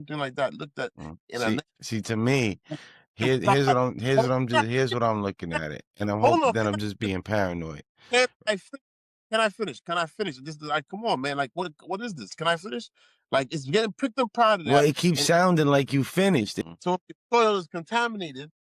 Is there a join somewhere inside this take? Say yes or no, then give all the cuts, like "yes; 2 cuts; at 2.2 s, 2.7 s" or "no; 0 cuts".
yes; 1 cut; at 16.6 s